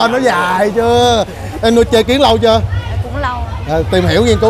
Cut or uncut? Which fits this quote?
uncut